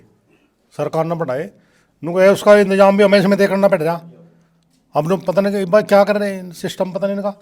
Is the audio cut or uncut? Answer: uncut